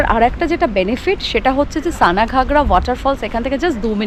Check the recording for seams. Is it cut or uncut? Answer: uncut